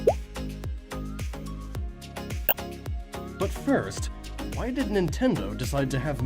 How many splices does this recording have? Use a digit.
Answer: 1